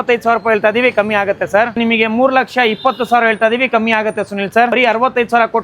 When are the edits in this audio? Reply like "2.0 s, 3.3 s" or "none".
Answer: 1.8 s, 4.7 s

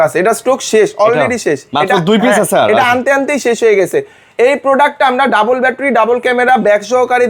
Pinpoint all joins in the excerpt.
none

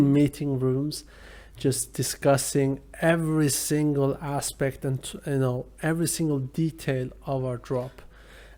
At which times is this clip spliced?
none

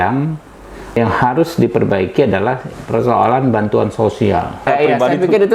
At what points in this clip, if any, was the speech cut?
1.0 s, 4.6 s

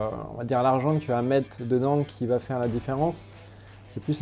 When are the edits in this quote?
none

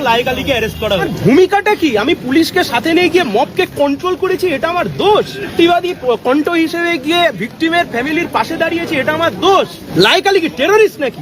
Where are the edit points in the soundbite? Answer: 1.1 s, 5.5 s, 9.8 s

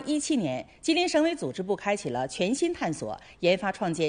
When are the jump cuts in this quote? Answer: 2.1 s

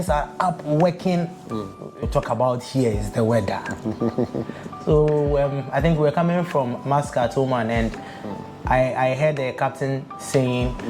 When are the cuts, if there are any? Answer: 2.0 s

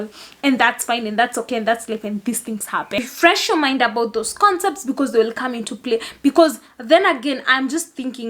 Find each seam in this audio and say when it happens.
3.0 s

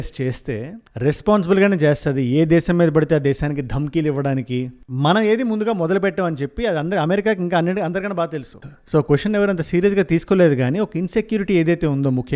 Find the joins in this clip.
none

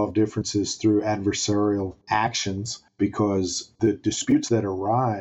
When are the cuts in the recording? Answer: none

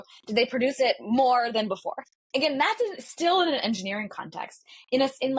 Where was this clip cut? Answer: none

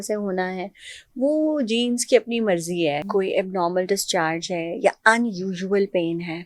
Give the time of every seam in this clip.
3.0 s

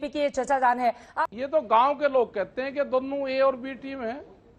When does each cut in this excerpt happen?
1.1 s

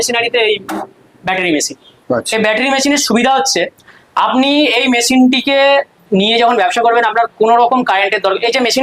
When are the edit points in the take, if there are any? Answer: none

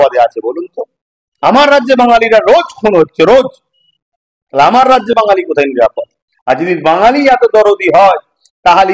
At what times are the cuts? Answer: none

